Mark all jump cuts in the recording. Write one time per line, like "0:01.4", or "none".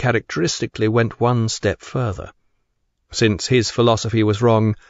none